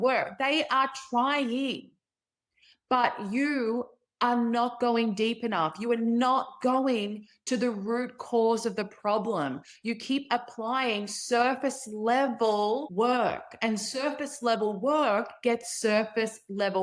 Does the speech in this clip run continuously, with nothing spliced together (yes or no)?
no